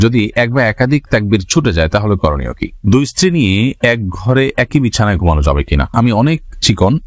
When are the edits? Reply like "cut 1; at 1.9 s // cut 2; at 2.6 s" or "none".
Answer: cut 1; at 2.7 s // cut 2; at 5.9 s

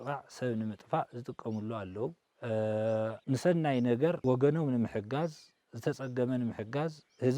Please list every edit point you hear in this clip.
cut 1; at 2.3 s // cut 2; at 3.2 s // cut 3; at 4.2 s

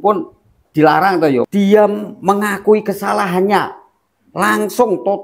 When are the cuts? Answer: cut 1; at 1.5 s

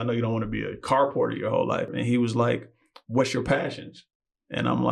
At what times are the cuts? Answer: cut 1; at 2.0 s

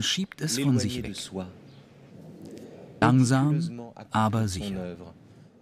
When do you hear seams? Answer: none

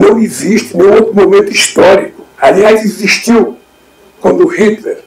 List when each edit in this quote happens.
cut 1; at 2.2 s

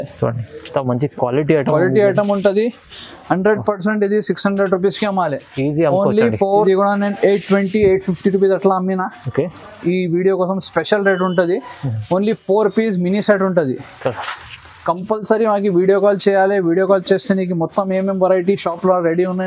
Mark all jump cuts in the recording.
cut 1; at 6.6 s

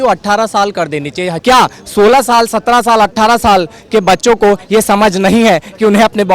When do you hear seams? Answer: cut 1; at 1.3 s

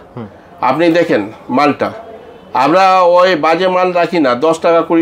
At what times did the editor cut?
none

